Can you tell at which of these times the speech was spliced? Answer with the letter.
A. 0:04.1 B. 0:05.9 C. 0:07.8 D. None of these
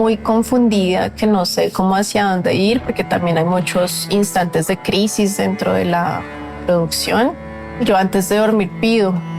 C